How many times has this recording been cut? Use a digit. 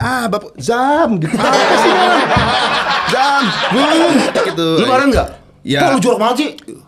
1